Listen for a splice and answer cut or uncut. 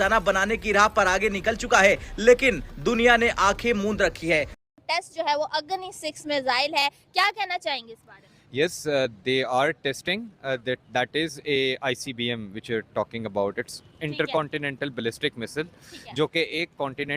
cut